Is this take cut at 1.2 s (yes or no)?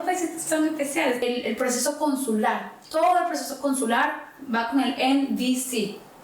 yes